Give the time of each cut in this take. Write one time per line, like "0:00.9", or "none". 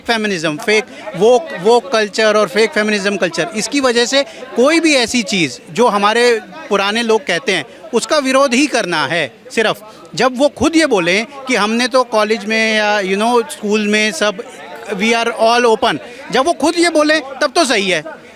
none